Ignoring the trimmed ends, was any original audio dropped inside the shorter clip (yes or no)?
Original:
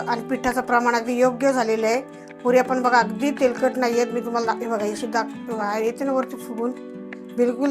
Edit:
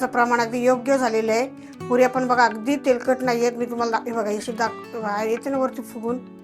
no